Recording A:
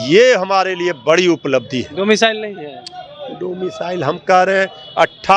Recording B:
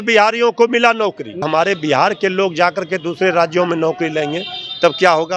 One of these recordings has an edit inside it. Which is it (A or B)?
B